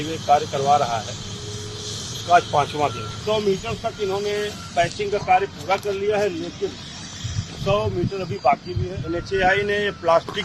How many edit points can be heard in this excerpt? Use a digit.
2